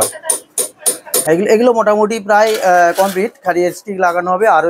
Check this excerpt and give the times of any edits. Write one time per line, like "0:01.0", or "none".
0:01.2